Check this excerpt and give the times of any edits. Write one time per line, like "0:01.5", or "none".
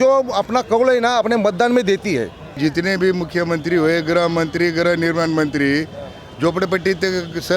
0:02.6